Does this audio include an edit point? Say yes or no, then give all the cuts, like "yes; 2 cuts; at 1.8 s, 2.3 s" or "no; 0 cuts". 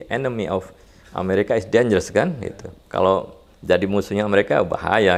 no; 0 cuts